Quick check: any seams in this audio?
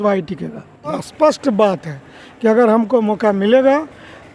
yes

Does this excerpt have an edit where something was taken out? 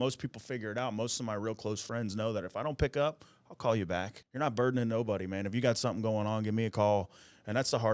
yes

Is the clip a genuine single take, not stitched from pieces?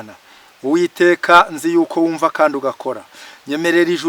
yes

